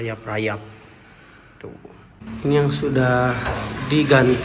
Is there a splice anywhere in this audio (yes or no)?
yes